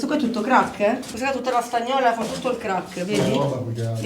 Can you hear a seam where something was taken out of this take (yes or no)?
yes